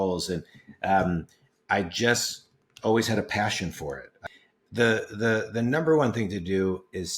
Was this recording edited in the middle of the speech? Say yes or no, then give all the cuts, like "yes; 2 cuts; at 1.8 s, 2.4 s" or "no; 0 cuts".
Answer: yes; 1 cut; at 4.1 s